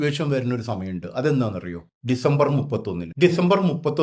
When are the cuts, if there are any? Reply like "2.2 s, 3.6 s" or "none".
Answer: 3.0 s